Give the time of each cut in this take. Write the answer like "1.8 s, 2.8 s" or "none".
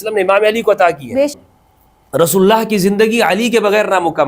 1.5 s